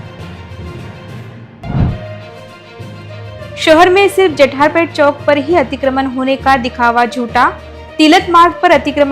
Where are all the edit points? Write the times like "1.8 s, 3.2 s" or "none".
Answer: 1.5 s